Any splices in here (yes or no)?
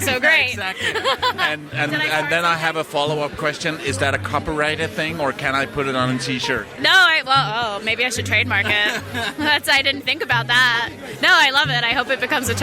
yes